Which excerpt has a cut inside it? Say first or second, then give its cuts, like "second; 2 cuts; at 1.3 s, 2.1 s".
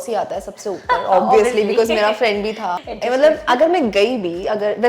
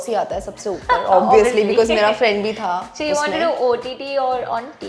first; 1 cut; at 2.9 s